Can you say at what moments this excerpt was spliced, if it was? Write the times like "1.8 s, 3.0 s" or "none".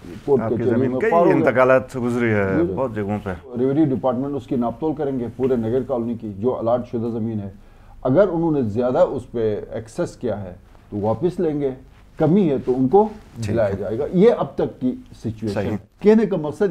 3.5 s, 15.9 s